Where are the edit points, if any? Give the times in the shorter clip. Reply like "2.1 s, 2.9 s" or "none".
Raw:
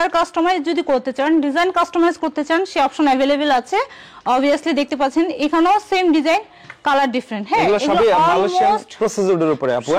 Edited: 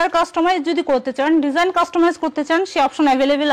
none